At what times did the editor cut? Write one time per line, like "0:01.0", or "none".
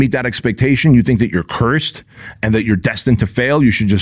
none